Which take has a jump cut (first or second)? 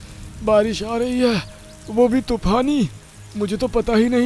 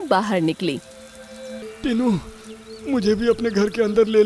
second